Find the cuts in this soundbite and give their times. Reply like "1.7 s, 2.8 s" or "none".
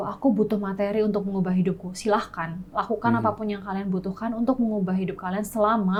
none